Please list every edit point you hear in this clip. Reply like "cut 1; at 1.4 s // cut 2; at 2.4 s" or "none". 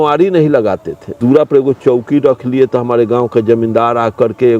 cut 1; at 1.2 s